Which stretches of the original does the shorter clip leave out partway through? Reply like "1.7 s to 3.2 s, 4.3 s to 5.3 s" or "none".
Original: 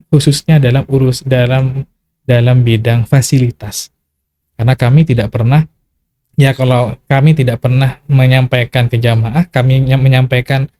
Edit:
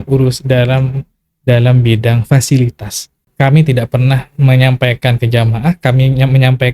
4.1 s to 7.0 s